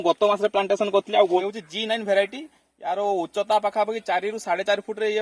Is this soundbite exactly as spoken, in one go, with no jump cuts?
no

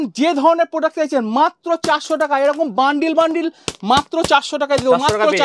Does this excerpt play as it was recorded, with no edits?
yes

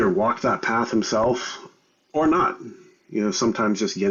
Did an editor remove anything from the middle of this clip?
no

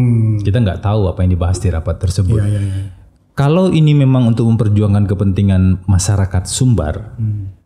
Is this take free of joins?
yes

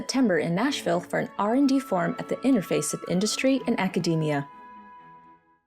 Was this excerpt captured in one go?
no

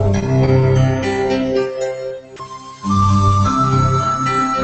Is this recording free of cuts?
yes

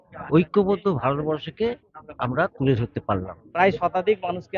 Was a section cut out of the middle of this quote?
yes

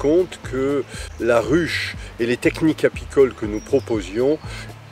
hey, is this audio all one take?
no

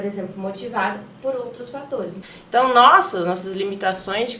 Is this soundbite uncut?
no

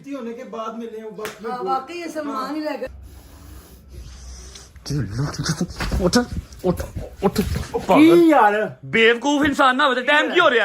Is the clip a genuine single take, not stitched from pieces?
no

